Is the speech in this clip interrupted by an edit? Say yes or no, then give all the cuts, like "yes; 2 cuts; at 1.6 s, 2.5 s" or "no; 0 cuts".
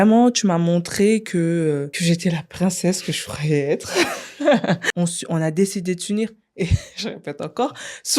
yes; 2 cuts; at 1.9 s, 4.8 s